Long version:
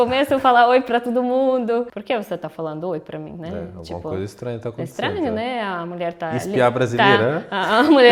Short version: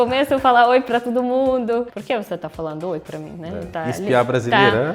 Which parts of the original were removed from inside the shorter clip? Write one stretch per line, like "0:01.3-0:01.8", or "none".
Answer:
0:03.7-0:06.2